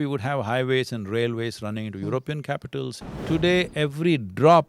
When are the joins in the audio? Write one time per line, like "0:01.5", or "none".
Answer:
0:03.0